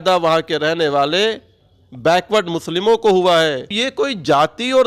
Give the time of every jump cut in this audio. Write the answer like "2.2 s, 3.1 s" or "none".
3.7 s